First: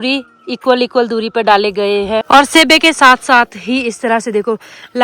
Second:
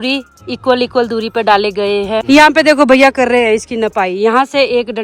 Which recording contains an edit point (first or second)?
first